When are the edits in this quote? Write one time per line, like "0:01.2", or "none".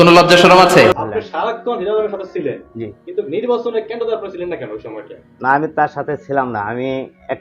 0:01.0